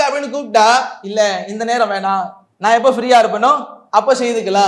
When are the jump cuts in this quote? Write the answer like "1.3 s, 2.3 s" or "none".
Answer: 1.0 s, 2.4 s, 3.7 s